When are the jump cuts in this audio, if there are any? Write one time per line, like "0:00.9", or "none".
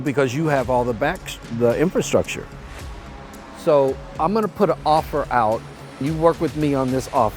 0:06.0

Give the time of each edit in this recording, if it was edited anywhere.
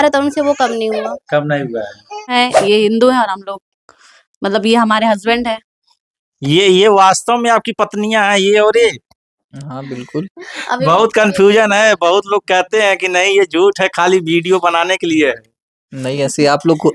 0:02.3

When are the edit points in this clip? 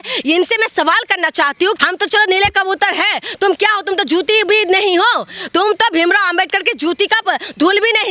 0:01.8

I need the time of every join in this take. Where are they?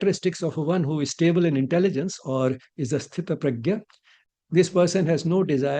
0:04.2

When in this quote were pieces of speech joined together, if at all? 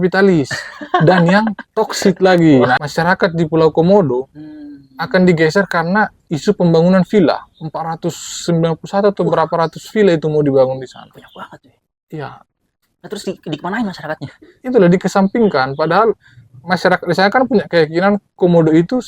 0:02.7

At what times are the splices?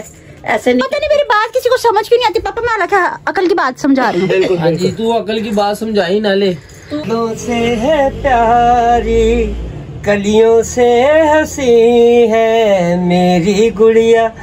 0:07.0

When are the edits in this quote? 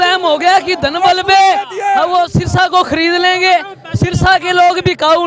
none

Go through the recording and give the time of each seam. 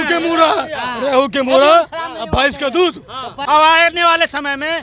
0:03.4

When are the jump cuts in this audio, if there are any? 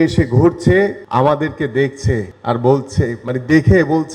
0:01.0

